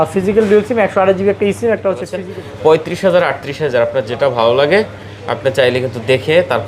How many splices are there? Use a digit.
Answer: 1